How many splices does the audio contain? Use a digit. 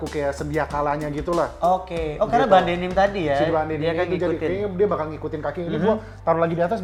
0